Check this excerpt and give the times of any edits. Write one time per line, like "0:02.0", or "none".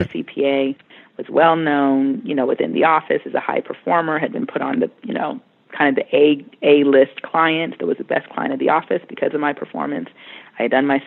none